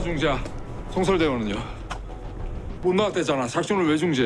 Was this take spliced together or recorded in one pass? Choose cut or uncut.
uncut